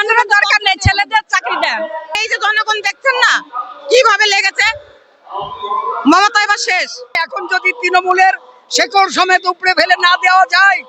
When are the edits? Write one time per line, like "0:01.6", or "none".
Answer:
0:02.0
0:07.2